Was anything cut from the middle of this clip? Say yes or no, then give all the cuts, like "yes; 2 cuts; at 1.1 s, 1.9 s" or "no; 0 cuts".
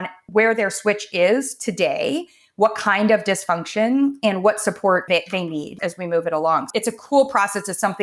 yes; 2 cuts; at 5.8 s, 6.7 s